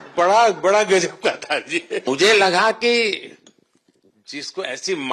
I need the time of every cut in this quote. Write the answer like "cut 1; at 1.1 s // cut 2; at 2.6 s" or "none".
cut 1; at 2.0 s

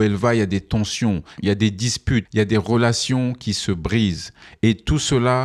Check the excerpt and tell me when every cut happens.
none

